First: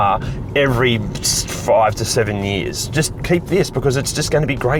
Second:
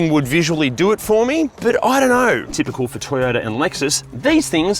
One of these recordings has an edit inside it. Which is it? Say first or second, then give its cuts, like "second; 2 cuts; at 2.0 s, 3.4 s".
second; 2 cuts; at 1.5 s, 2.5 s